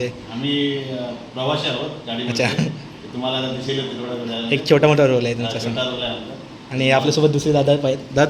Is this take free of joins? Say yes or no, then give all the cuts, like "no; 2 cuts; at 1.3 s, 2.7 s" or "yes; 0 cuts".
yes; 0 cuts